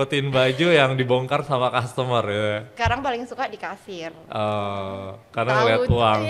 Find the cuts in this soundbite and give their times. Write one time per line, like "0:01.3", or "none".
0:02.7

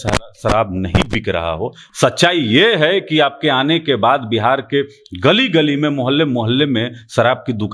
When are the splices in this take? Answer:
0:01.8

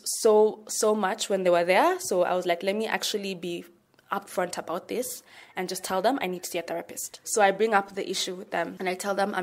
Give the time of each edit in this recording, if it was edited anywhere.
none

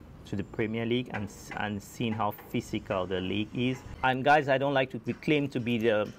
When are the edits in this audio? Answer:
0:03.9

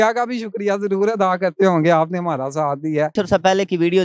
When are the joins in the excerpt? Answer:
0:03.1

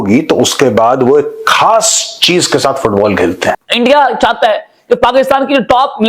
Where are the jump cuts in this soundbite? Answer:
0:03.6

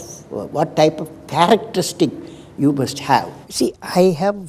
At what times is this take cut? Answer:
0:03.5

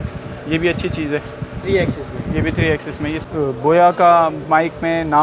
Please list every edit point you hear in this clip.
0:03.2

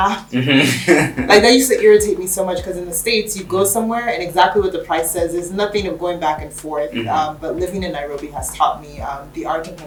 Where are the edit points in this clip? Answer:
none

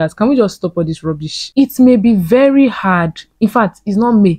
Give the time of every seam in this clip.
0:01.3

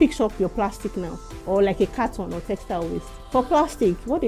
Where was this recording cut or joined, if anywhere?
0:03.1

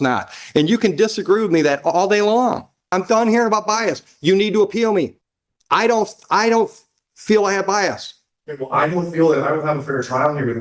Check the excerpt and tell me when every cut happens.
0:02.8

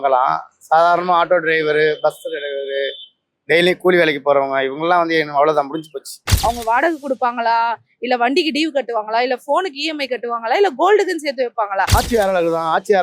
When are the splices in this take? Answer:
0:06.2
0:11.9

